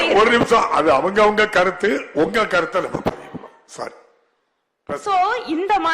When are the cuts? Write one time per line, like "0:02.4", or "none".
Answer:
none